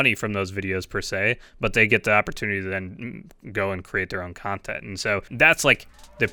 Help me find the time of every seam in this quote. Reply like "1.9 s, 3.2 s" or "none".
5.3 s